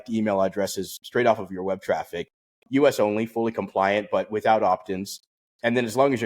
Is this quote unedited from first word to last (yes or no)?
yes